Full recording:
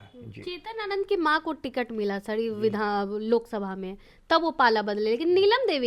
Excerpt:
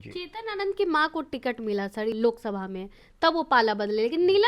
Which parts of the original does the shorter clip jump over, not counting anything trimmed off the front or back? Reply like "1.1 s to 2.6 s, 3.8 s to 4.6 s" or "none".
2.4 s to 3.2 s